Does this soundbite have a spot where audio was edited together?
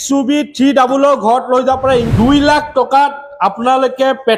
yes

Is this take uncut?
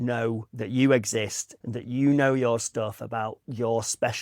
yes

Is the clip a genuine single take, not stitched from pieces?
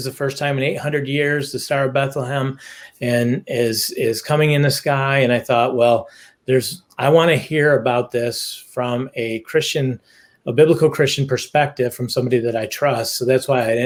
yes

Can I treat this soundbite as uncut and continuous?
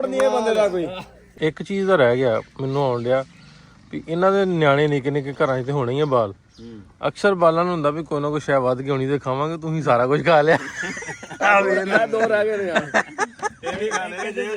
no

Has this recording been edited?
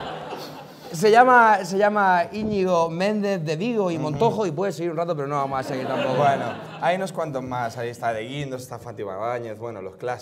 yes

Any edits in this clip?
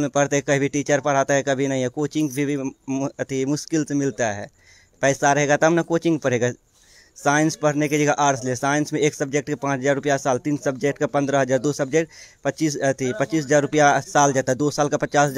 no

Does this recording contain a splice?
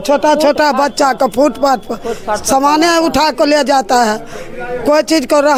no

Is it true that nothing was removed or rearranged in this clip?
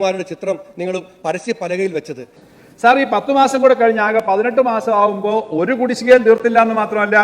no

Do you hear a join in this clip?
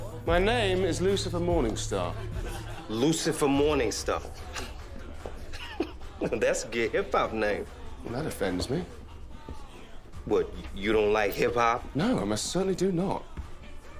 no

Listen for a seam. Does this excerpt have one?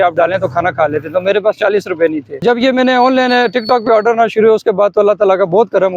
yes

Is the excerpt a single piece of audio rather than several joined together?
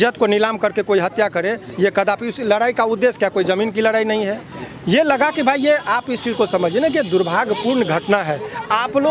yes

